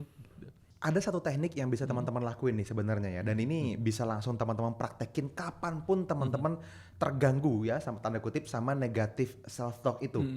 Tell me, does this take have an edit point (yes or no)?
no